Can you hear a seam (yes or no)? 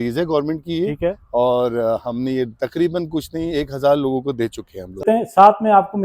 yes